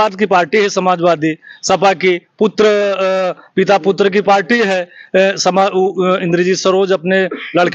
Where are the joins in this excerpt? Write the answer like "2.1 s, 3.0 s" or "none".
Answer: none